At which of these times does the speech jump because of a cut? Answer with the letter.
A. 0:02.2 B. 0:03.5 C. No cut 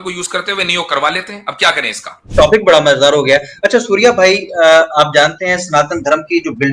A